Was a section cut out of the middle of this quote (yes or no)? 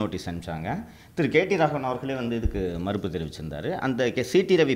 no